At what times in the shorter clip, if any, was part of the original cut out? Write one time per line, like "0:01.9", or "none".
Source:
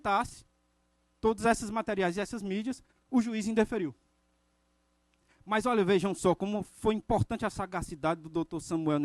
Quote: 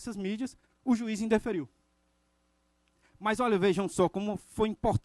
none